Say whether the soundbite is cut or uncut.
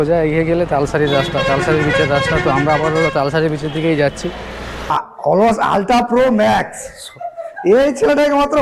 cut